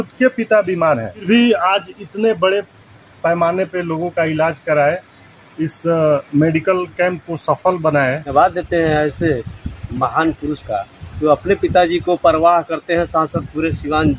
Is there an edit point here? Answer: yes; 2 cuts; at 1.2 s, 8.3 s

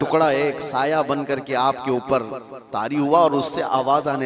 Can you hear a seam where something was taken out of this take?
no; 0 cuts

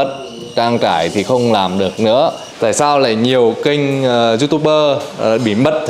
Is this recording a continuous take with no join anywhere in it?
no; 1 cut; at 2.5 s

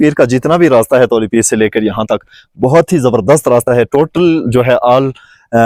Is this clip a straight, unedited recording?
yes; 0 cuts

